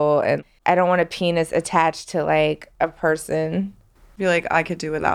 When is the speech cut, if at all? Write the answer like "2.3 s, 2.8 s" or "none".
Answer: 2.7 s